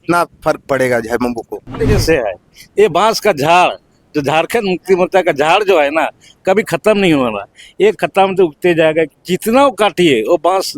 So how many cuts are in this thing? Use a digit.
1